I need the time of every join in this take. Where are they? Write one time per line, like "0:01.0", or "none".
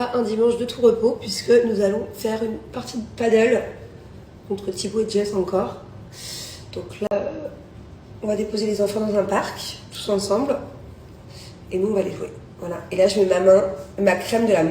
0:07.1